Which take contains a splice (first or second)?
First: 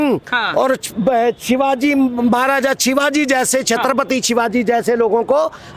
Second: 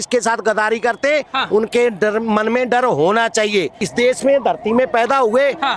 second